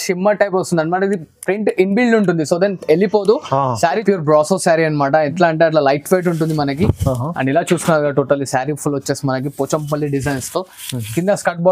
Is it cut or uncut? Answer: cut